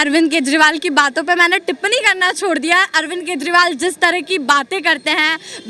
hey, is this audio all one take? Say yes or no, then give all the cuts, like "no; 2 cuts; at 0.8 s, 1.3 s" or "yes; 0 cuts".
yes; 0 cuts